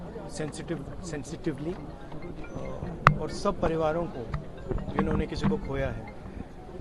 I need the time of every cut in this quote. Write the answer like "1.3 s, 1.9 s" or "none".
none